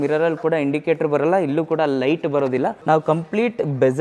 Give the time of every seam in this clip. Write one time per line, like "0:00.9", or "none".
0:02.8